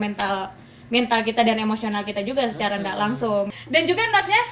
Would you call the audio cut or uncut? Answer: uncut